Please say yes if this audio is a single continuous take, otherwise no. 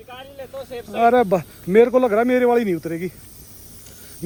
yes